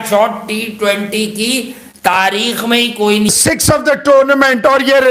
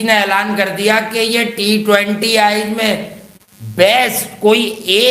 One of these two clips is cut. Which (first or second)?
first